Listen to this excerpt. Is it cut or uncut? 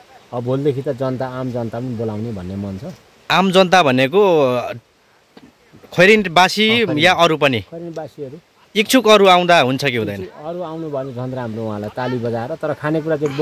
uncut